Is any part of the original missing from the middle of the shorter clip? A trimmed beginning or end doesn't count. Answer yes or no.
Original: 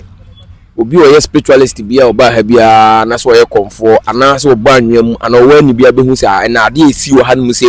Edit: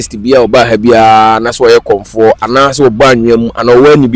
no